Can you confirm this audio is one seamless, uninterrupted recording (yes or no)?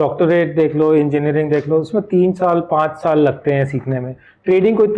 yes